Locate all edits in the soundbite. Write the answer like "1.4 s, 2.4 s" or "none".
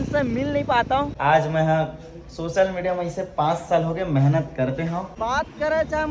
1.1 s, 5.1 s